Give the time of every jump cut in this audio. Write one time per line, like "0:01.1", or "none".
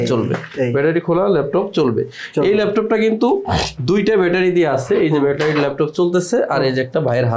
none